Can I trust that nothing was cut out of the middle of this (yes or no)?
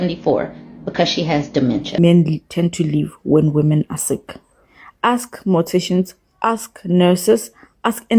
no